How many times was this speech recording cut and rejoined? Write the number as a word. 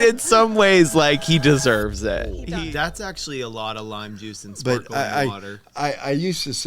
one